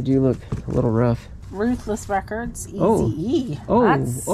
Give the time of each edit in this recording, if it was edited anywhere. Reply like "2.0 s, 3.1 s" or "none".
1.4 s